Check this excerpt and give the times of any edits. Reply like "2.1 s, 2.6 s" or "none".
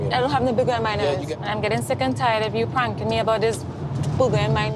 1.3 s

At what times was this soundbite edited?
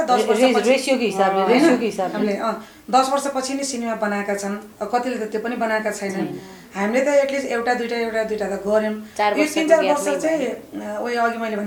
none

